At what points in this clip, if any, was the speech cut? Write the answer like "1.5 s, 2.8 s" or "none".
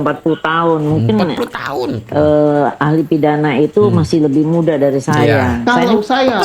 5.5 s